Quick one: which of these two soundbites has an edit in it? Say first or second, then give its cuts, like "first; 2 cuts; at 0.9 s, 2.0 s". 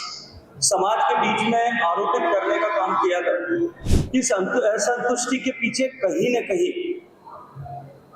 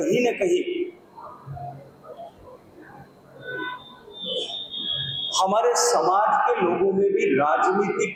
first; 1 cut; at 3.9 s